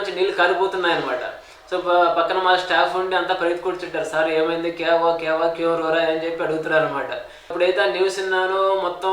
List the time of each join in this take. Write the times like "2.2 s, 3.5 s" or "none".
7.5 s